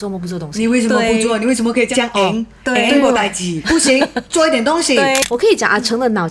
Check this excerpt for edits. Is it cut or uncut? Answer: cut